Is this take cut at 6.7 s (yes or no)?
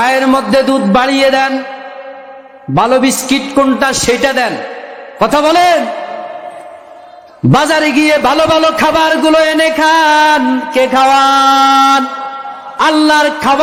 no